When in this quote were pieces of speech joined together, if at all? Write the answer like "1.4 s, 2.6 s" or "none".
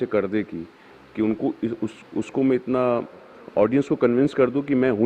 none